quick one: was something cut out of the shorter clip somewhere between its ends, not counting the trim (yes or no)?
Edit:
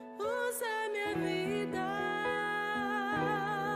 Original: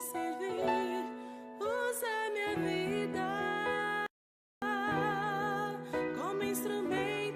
yes